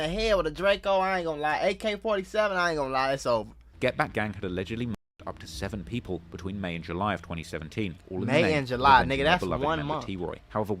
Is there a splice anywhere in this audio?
yes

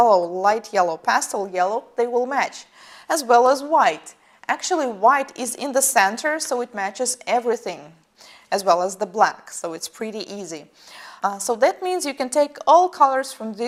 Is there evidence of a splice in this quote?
no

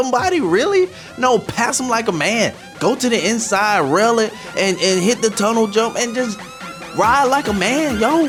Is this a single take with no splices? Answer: yes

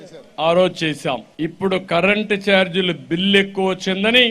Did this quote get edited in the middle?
yes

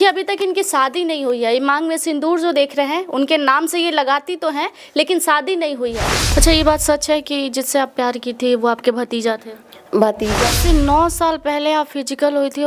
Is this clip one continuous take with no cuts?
no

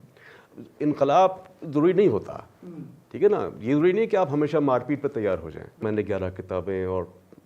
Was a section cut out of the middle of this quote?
yes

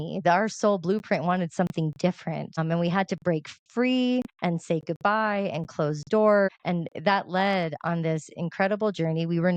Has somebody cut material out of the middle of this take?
yes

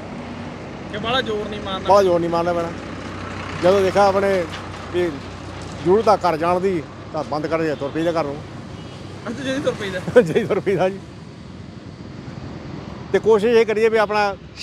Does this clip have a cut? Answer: no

